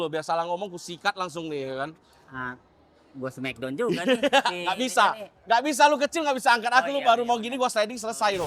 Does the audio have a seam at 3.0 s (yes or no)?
no